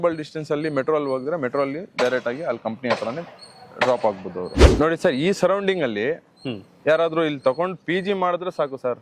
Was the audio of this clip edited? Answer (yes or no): yes